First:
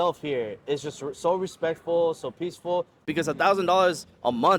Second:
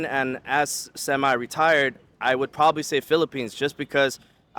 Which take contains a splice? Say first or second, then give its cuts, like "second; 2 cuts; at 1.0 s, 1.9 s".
first; 1 cut; at 3.0 s